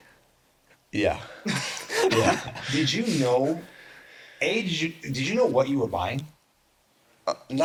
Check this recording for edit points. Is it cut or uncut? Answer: uncut